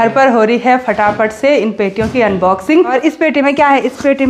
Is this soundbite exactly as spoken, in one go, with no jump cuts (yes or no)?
no